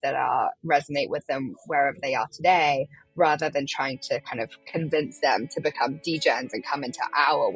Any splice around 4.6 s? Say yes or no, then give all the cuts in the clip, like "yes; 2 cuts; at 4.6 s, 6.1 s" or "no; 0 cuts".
yes; 1 cut; at 4.6 s